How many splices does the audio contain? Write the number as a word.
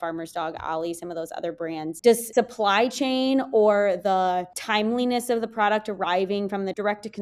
one